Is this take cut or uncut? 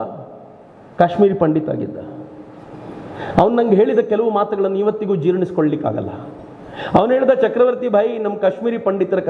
uncut